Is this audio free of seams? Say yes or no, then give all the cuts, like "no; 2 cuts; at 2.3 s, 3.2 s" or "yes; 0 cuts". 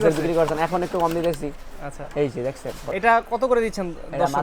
no; 1 cut; at 2.8 s